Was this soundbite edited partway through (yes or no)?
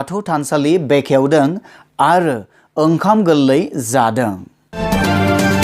yes